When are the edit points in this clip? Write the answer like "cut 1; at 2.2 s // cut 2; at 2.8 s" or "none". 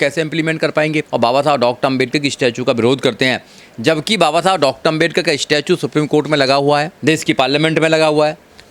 cut 1; at 1.0 s